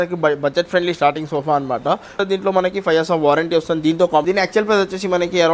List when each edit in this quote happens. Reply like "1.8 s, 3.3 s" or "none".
2.2 s, 4.2 s